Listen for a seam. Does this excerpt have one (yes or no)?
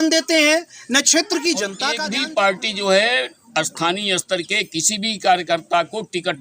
yes